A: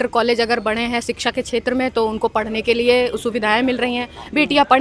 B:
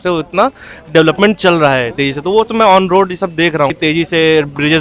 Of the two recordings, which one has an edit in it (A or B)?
B